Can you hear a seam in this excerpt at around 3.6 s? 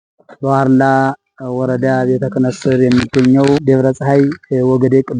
yes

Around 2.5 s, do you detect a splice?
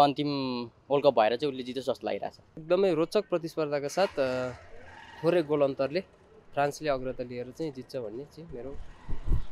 yes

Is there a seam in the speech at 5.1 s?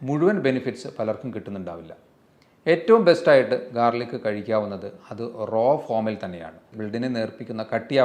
no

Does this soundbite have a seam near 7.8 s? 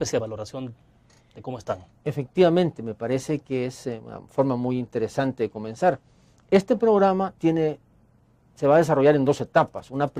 yes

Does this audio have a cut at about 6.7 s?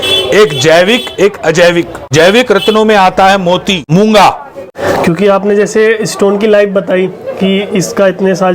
no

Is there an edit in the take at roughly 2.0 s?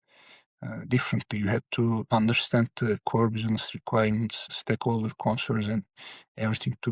yes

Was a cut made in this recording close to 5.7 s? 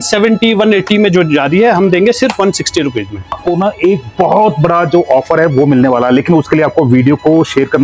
no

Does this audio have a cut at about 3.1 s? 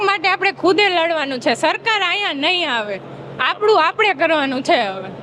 no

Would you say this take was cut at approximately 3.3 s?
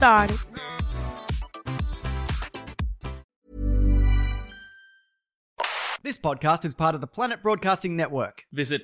yes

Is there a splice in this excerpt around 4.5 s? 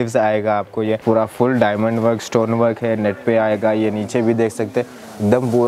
no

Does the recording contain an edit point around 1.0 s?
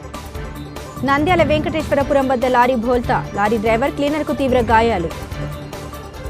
yes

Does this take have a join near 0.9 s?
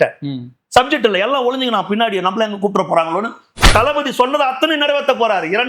no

